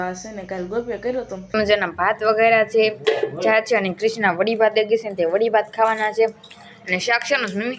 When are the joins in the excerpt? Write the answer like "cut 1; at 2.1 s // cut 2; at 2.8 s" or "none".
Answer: cut 1; at 1.5 s